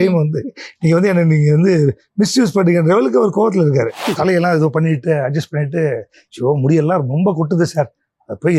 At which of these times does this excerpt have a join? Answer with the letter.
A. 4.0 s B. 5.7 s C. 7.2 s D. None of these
A